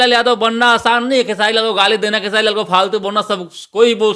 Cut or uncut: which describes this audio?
uncut